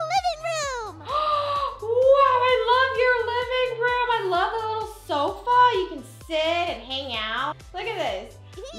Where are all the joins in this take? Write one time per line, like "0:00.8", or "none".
0:07.6